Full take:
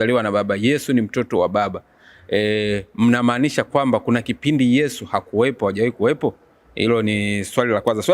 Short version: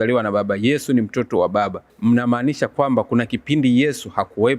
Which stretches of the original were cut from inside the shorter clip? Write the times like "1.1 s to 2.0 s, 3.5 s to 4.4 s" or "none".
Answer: 1.9 s to 2.9 s